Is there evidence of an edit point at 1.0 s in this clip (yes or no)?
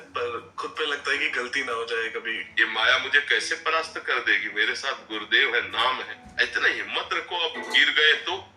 no